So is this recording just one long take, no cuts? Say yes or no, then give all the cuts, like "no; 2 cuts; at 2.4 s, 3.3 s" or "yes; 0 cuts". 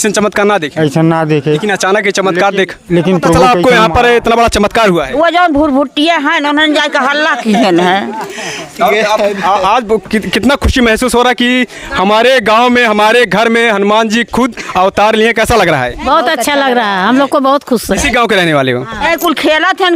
no; 1 cut; at 3.4 s